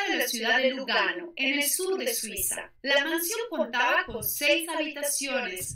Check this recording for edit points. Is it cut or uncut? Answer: uncut